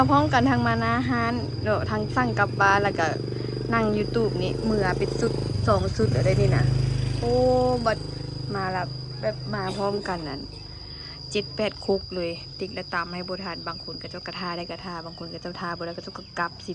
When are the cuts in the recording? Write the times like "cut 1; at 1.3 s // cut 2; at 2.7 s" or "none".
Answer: none